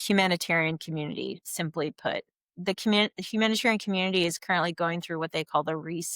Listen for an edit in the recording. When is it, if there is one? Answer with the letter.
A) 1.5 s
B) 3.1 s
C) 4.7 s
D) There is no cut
A